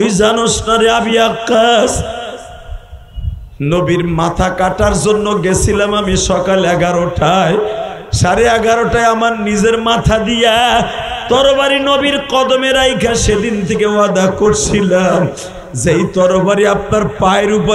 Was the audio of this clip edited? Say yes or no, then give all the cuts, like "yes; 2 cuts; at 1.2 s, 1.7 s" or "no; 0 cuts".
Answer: no; 0 cuts